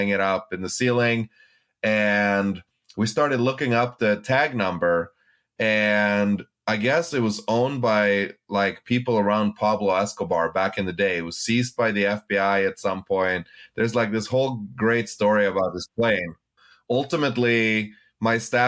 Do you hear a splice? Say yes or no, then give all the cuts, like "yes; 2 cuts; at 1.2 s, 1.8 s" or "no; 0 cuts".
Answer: yes; 1 cut; at 16.4 s